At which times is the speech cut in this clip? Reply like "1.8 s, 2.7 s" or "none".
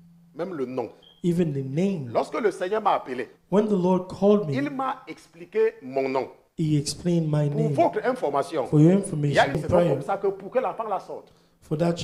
9.6 s